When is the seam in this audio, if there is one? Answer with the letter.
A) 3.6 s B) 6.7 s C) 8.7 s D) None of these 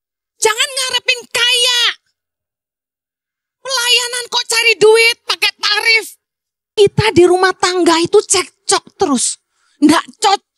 B